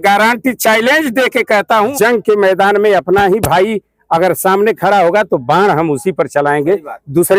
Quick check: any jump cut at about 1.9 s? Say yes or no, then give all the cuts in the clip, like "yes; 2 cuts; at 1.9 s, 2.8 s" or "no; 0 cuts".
yes; 1 cut; at 1.9 s